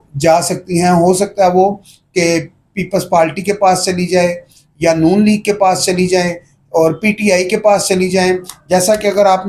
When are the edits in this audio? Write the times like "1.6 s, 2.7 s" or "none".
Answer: none

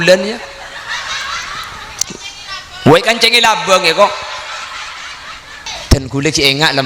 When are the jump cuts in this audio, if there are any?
5.7 s

